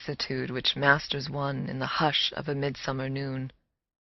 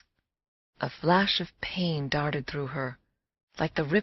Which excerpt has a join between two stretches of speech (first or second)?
second